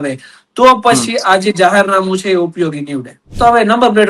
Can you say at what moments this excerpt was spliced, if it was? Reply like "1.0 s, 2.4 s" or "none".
3.2 s

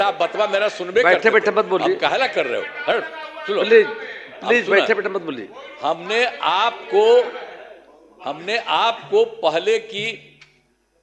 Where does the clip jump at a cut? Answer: none

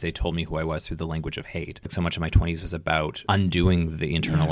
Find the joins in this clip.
1.9 s

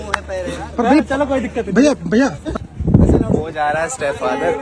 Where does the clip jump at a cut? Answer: 2.6 s

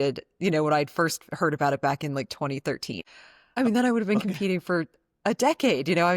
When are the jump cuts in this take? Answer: 3.1 s

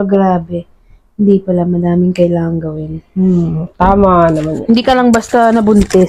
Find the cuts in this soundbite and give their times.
none

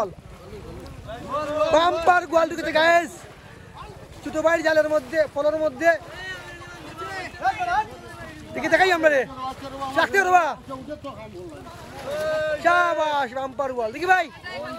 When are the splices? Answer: none

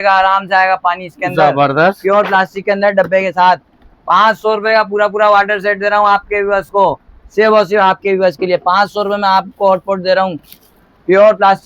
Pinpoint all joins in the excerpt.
none

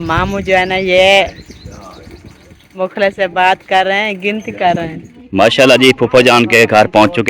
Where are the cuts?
5.2 s

